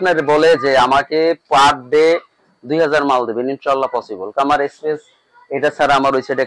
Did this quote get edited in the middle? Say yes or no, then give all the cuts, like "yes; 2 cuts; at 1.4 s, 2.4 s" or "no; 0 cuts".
no; 0 cuts